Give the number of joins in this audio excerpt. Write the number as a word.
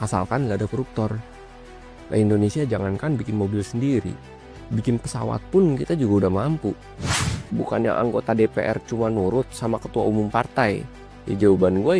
one